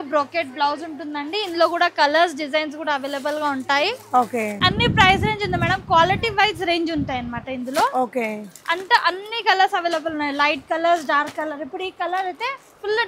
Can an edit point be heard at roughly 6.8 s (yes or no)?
no